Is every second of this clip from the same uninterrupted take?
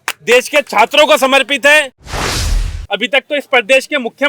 no; 1 cut; at 2.3 s

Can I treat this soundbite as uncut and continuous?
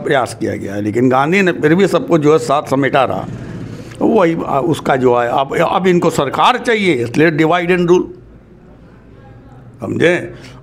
yes; 0 cuts

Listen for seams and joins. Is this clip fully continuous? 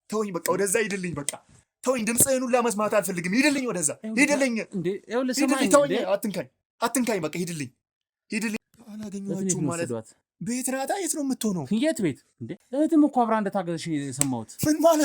no; 2 cuts; at 8.6 s, 12.6 s

